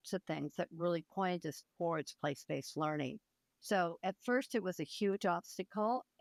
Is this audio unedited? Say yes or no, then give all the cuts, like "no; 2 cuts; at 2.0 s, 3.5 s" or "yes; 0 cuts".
yes; 0 cuts